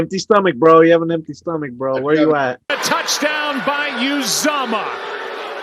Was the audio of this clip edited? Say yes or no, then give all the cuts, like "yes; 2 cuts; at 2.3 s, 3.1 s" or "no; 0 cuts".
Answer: yes; 1 cut; at 2.7 s